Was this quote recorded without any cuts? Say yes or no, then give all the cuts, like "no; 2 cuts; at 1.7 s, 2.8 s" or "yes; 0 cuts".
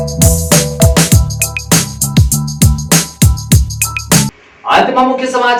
yes; 0 cuts